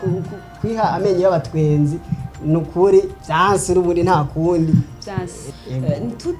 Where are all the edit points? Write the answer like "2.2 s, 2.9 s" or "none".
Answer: 3.2 s, 5.4 s